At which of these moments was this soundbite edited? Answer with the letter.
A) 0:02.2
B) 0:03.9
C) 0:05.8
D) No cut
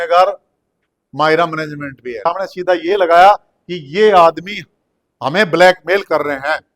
A